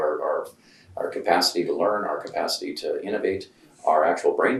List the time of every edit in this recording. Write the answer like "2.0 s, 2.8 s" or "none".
none